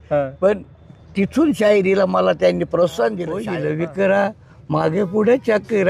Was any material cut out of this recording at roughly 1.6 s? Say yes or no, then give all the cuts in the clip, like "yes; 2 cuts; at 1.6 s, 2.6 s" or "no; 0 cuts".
no; 1 cut; at 3.4 s